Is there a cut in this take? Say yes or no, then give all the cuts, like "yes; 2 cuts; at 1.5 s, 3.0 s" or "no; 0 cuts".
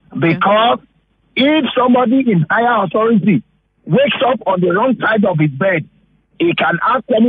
no; 0 cuts